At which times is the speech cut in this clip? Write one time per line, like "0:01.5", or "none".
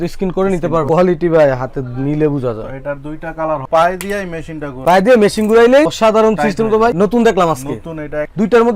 0:00.9
0:03.6